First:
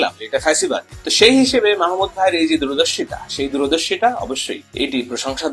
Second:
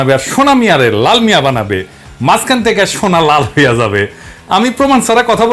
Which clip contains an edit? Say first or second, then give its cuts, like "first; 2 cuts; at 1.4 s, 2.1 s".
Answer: first; 2 cuts; at 1.0 s, 4.6 s